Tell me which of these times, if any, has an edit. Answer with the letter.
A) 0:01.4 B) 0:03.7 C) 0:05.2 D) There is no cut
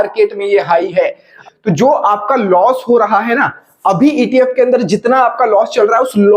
A